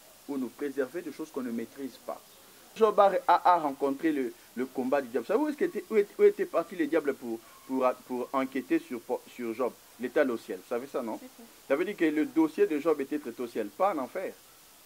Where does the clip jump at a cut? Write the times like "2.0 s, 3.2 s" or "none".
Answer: 2.8 s